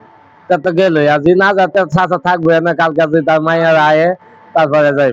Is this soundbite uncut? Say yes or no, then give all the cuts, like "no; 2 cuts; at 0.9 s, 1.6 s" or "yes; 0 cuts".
yes; 0 cuts